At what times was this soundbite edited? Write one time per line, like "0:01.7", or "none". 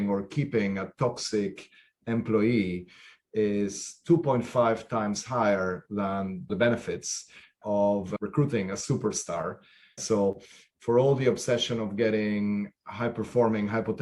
0:06.5
0:08.1
0:10.0